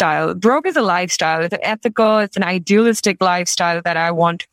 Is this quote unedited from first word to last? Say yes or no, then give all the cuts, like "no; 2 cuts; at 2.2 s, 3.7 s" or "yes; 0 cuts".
yes; 0 cuts